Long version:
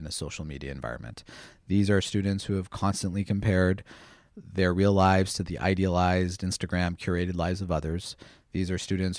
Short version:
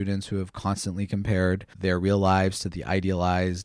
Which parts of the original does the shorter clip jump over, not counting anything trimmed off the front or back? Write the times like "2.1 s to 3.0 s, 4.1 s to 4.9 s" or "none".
3.9 s to 4.4 s